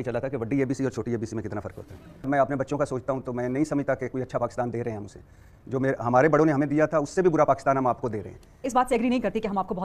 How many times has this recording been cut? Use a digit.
2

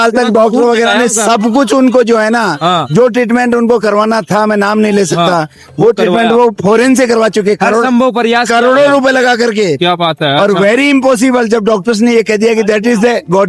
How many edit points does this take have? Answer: 0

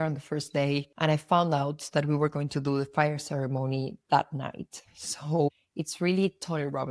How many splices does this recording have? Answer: 1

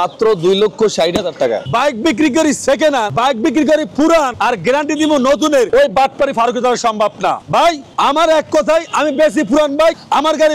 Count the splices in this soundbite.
5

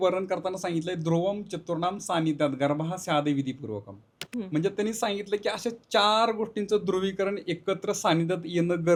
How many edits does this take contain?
0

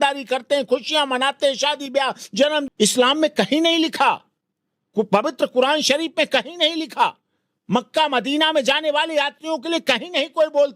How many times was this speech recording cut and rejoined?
1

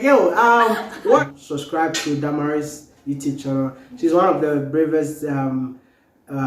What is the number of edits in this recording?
1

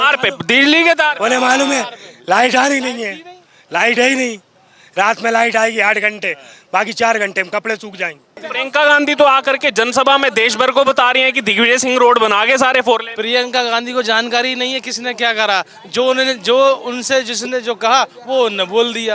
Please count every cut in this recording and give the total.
1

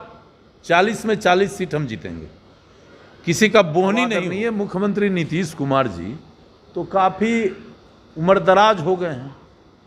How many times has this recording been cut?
1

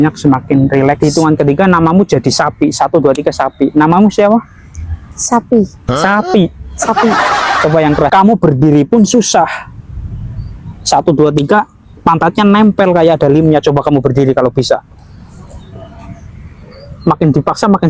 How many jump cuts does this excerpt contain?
2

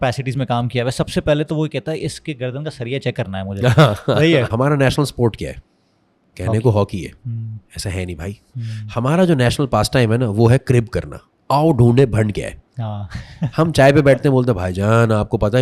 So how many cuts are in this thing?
1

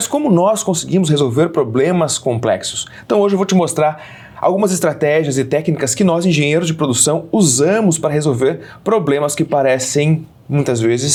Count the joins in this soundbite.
0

